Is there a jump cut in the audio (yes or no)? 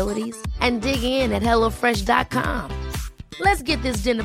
no